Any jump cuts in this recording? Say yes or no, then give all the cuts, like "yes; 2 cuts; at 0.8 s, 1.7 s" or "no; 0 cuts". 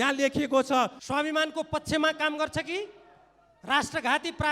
yes; 1 cut; at 1.0 s